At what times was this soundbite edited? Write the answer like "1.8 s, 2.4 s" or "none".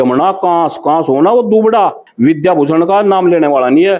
2.0 s